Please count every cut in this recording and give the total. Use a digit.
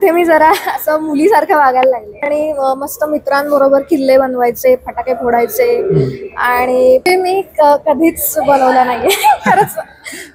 2